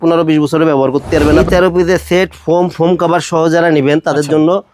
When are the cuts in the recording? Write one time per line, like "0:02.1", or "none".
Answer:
0:01.2